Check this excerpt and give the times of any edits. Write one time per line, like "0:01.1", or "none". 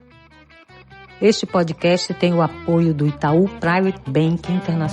0:01.2